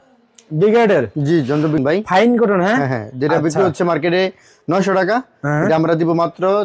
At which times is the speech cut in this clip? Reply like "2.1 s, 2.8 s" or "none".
1.8 s